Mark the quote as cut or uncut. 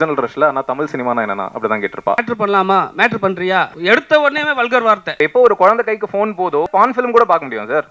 cut